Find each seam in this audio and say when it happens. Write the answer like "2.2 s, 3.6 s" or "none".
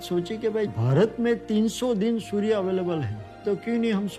none